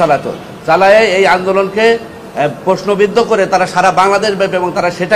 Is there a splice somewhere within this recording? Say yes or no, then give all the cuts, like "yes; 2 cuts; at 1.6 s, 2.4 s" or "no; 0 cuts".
no; 0 cuts